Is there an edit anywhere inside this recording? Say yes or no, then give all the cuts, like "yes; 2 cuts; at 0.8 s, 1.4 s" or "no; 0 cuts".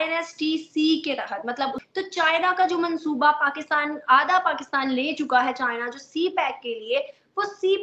yes; 1 cut; at 1.8 s